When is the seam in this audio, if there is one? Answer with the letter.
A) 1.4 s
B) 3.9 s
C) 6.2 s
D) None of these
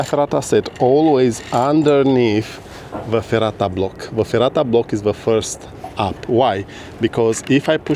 D